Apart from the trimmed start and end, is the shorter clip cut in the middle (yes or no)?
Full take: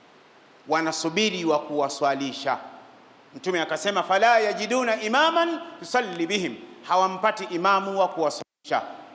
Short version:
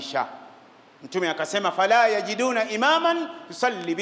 no